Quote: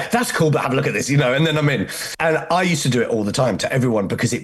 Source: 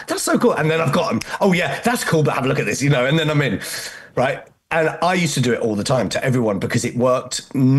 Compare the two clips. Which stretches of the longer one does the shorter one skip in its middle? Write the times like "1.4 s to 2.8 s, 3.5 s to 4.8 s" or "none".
3.8 s to 4.5 s